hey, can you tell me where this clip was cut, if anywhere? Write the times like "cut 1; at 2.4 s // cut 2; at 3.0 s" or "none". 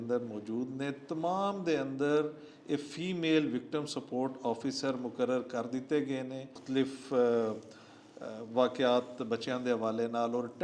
cut 1; at 6.4 s